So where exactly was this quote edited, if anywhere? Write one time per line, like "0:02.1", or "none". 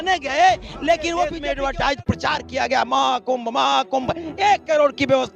0:01.4